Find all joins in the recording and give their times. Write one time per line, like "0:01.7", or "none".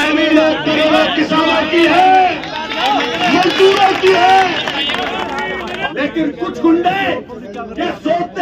0:05.8